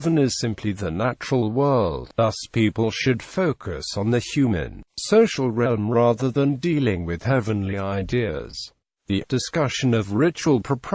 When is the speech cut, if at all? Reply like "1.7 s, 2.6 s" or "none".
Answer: 5.9 s